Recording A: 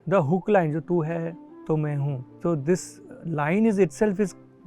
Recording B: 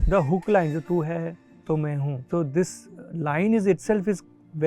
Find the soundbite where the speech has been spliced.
B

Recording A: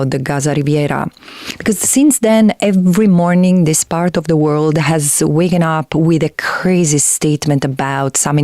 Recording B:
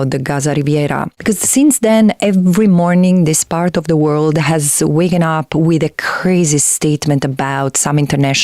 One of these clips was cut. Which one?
B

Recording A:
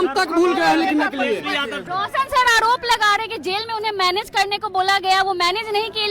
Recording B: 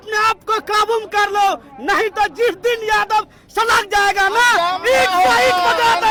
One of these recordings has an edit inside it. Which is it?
A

